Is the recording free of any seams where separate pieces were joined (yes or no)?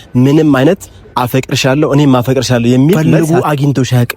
no